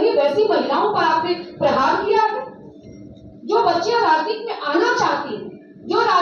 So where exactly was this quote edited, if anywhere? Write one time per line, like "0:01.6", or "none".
none